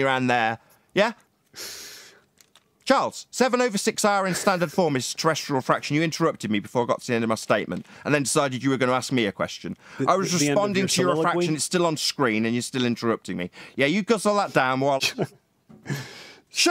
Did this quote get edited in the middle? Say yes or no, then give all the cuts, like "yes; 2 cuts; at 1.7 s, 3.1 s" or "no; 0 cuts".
yes; 1 cut; at 15.0 s